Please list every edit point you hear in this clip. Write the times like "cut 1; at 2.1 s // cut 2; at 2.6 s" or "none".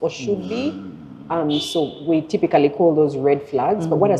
none